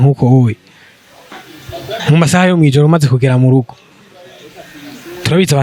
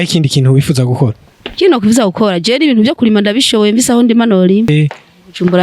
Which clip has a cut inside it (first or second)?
second